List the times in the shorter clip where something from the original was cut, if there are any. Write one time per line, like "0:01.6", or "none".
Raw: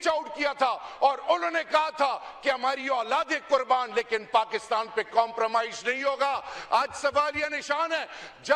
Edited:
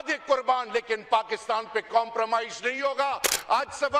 none